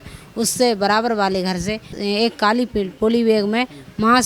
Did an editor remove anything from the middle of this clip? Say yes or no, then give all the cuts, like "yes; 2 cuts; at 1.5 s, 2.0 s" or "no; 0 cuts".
yes; 1 cut; at 2.0 s